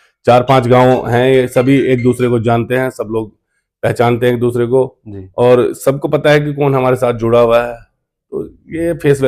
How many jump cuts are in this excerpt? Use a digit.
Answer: 0